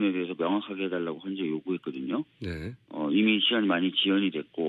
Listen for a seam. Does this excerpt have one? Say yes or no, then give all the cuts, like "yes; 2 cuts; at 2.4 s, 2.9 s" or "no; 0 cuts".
yes; 1 cut; at 2.7 s